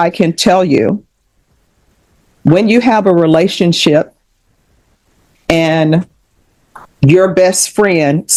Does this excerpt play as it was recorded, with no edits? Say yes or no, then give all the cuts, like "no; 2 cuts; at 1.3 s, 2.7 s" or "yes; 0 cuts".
yes; 0 cuts